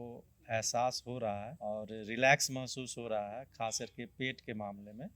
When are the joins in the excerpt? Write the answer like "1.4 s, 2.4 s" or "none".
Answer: 1.5 s

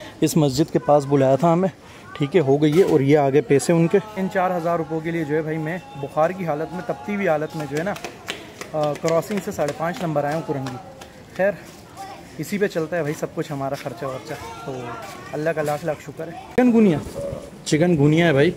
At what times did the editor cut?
4.2 s, 16.6 s

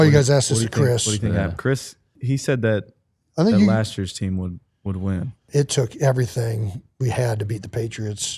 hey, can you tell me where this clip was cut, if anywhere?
5.4 s

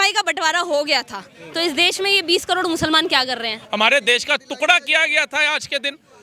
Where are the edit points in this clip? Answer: 3.6 s

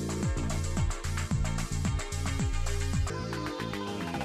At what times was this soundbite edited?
3.1 s

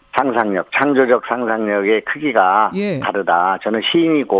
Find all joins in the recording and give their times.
2.0 s

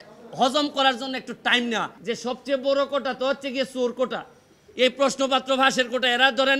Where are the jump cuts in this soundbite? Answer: 1.9 s

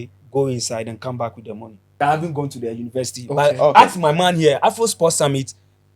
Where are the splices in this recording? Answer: 2.0 s

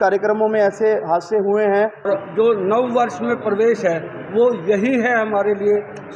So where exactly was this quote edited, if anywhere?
2.1 s

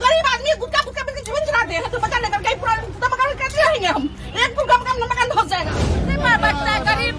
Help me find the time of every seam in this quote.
6.1 s

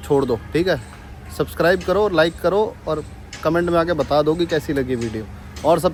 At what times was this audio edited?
none

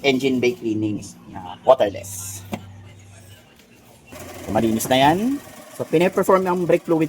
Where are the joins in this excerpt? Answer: 4.1 s

